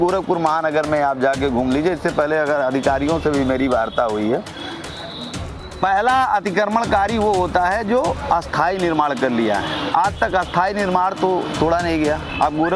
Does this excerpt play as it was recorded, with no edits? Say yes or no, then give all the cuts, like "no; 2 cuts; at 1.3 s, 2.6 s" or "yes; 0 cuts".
yes; 0 cuts